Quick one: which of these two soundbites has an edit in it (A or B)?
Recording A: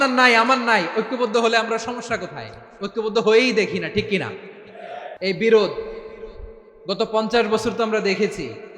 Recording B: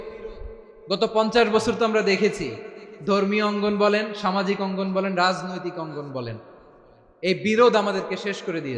A